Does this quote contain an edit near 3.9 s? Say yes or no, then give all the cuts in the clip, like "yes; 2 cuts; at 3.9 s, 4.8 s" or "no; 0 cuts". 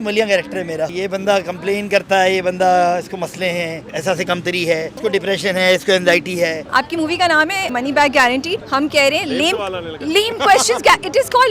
yes; 6 cuts; at 0.9 s, 3.9 s, 4.9 s, 6.6 s, 7.7 s, 8.6 s